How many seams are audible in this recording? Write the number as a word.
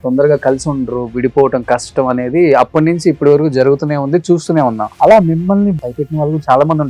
two